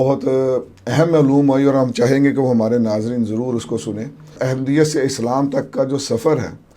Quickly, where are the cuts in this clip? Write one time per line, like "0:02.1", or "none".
0:04.4